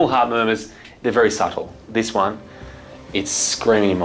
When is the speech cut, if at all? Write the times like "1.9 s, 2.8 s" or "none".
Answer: none